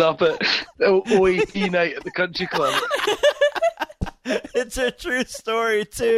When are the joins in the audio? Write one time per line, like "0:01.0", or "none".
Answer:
none

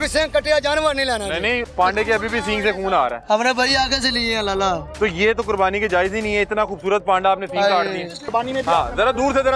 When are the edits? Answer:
0:01.6
0:08.2

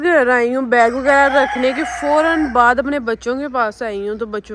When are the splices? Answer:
none

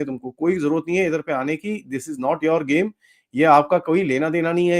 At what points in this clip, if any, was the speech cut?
none

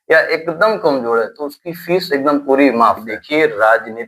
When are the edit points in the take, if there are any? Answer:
0:03.1

